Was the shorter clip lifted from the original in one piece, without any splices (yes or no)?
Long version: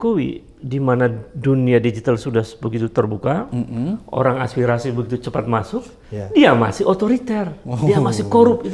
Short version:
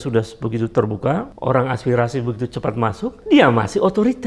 no